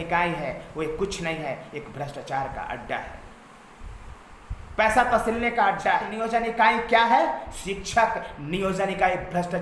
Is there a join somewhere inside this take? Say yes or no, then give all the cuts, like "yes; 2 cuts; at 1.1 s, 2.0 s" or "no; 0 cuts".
yes; 1 cut; at 6.1 s